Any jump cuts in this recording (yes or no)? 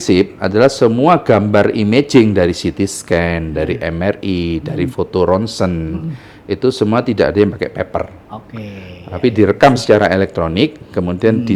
no